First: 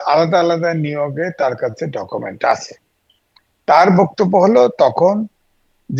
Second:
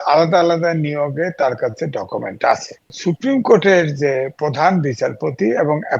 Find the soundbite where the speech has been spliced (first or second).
second